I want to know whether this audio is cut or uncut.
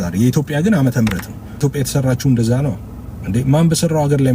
cut